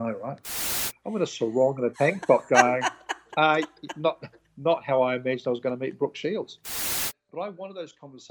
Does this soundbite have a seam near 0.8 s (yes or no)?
yes